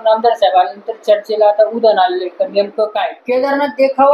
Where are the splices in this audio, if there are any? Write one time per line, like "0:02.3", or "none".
0:03.2